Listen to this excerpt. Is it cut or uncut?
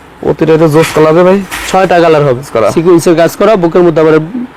cut